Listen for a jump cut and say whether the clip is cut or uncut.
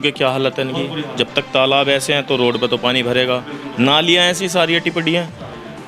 uncut